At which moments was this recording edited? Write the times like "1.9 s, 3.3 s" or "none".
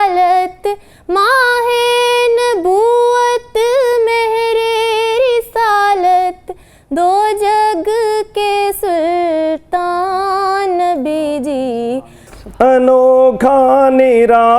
12.2 s

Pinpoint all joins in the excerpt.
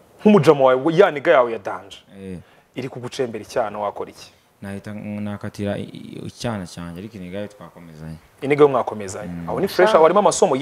none

